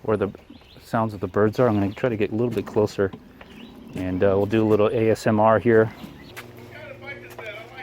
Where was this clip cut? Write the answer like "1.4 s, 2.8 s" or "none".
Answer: 6.3 s